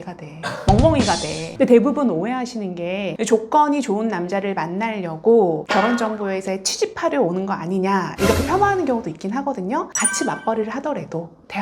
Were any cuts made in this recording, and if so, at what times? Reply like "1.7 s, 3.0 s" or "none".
1.4 s, 9.9 s